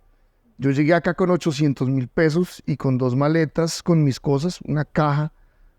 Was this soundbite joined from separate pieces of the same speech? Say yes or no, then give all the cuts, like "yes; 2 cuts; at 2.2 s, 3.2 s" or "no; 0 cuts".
no; 0 cuts